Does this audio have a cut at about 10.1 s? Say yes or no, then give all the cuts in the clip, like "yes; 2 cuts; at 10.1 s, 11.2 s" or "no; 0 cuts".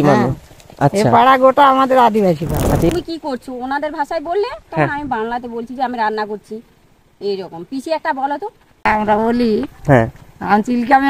no; 2 cuts; at 2.9 s, 8.8 s